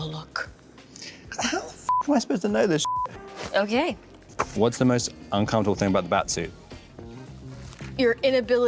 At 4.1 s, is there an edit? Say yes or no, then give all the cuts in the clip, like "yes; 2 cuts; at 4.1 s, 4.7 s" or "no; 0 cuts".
yes; 1 cut; at 4.1 s